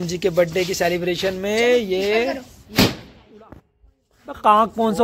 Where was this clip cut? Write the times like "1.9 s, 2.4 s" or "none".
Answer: none